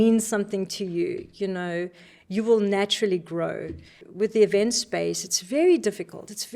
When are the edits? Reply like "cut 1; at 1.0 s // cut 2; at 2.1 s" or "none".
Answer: cut 1; at 4.0 s